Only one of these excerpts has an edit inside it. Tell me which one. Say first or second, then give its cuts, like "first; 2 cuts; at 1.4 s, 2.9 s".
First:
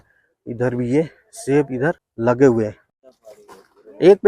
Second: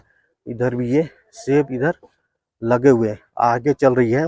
first; 2 cuts; at 2.1 s, 2.9 s